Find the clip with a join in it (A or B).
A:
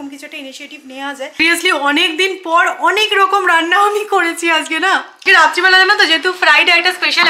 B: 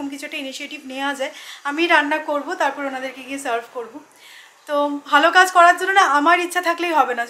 A